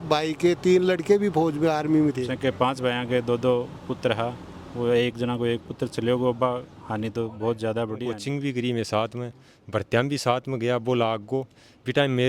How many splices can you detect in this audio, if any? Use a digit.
2